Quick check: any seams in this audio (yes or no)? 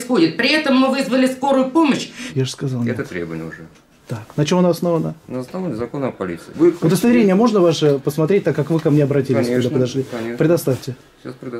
yes